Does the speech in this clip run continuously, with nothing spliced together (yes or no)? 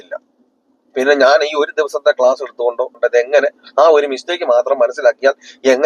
yes